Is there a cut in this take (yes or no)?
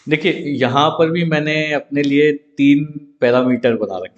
no